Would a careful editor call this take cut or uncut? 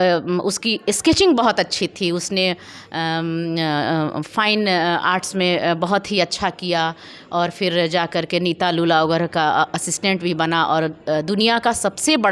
uncut